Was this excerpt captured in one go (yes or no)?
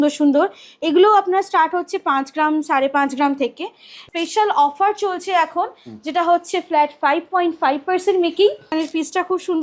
no